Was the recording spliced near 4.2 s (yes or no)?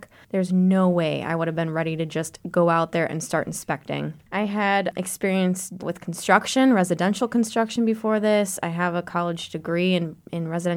yes